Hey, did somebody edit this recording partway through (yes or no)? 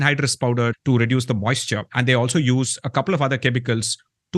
no